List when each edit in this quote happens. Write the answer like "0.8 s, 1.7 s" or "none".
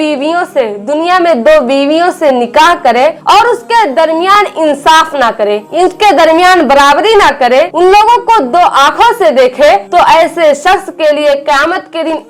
none